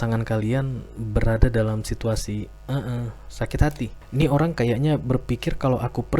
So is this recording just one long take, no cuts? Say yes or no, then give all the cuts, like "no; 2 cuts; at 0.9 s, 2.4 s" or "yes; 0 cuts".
no; 1 cut; at 4.0 s